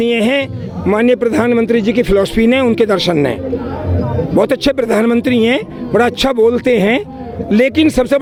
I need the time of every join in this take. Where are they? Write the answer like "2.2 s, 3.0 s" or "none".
none